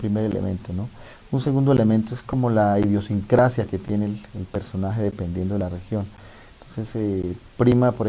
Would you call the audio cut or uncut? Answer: uncut